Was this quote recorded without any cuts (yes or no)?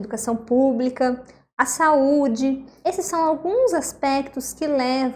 no